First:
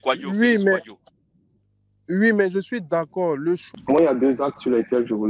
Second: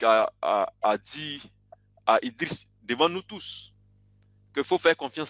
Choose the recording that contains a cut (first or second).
first